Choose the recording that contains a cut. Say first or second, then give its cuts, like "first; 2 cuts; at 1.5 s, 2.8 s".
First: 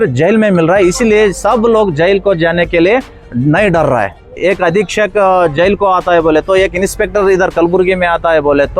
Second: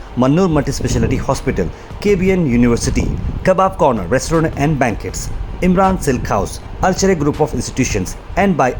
first; 1 cut; at 4.4 s